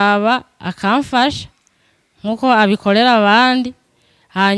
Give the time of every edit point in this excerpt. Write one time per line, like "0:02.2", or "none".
none